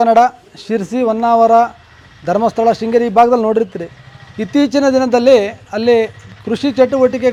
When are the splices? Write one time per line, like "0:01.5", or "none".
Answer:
none